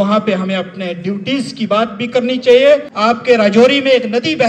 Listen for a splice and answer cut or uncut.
cut